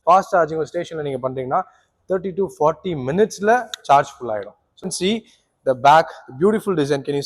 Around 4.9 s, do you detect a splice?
yes; 1 cut; at 4.9 s

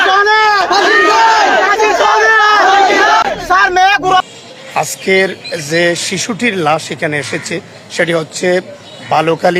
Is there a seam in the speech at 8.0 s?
no; 1 cut; at 4.2 s

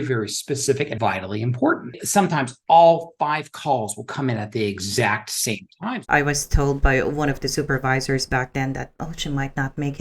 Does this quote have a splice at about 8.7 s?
no; 3 cuts; at 0.9 s, 2.0 s, 5.8 s

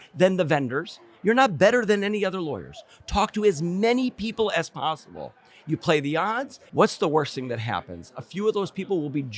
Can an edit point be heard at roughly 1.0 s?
no; 1 cut; at 6.5 s

